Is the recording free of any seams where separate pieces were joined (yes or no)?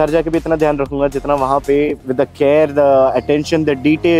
no